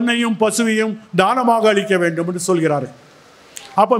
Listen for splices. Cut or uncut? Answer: uncut